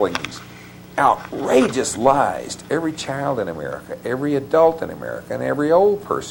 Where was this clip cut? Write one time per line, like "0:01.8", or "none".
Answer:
none